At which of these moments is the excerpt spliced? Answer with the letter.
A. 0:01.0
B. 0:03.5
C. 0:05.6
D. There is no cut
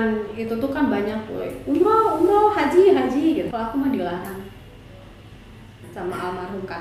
B